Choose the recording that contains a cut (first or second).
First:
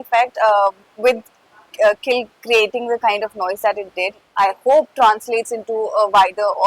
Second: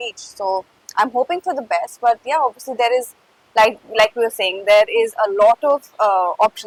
first